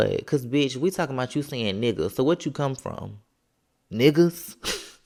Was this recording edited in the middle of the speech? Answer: no; 0 cuts

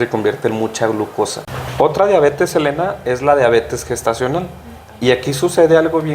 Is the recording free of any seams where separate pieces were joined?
no; 1 cut; at 1.7 s

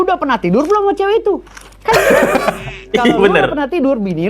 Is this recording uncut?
yes; 0 cuts

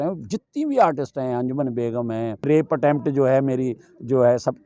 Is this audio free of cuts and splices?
no; 1 cut; at 2.5 s

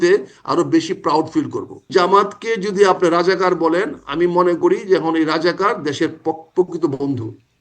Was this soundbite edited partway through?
yes; 1 cut; at 1.9 s

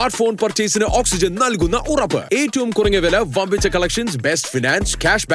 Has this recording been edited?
no; 0 cuts

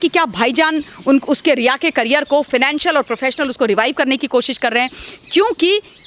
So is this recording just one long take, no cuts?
yes; 0 cuts

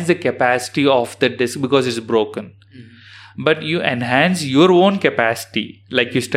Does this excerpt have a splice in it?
no; 0 cuts

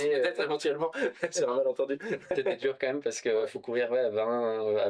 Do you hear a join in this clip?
yes; 1 cut; at 2.3 s

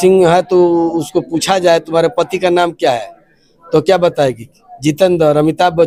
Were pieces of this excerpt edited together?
no; 0 cuts

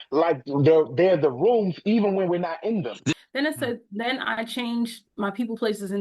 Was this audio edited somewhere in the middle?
yes; 1 cut; at 3.2 s

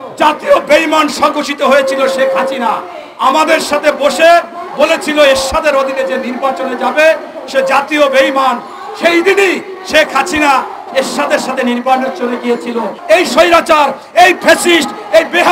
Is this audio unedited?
no; 1 cut; at 12.9 s

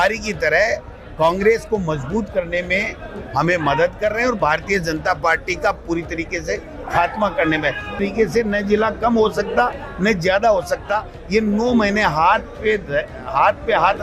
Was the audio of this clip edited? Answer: yes; 1 cut; at 8.0 s

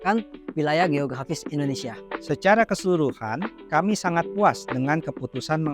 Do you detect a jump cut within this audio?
yes; 1 cut; at 2.1 s

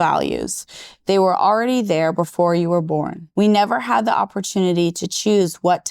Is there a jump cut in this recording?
yes; 1 cut; at 3.2 s

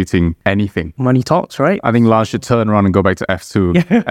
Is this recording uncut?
no; 1 cut; at 0.9 s

